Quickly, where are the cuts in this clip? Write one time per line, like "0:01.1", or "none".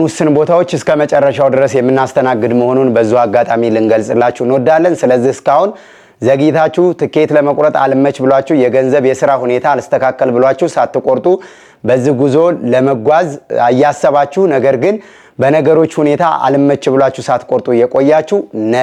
none